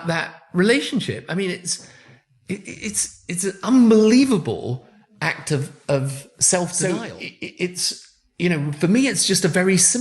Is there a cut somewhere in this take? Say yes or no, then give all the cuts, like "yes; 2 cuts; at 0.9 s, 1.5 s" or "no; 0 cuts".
no; 0 cuts